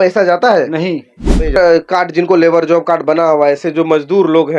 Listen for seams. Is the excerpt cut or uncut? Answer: cut